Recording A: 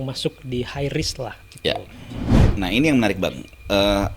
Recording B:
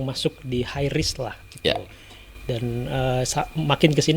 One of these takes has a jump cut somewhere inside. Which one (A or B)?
A